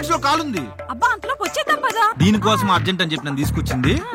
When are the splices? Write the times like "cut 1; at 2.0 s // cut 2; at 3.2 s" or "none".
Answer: cut 1; at 2.1 s